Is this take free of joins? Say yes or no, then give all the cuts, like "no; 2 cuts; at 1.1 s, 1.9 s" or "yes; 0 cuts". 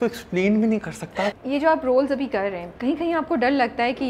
no; 2 cuts; at 1.3 s, 2.7 s